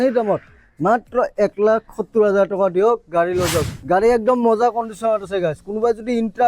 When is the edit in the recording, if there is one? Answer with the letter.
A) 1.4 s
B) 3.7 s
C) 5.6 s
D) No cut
B